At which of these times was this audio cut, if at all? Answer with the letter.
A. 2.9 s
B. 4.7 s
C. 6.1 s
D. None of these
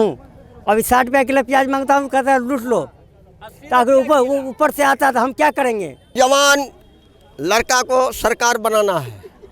C